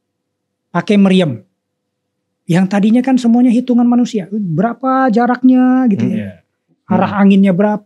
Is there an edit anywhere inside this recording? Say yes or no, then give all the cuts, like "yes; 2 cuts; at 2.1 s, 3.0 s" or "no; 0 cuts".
yes; 1 cut; at 6.8 s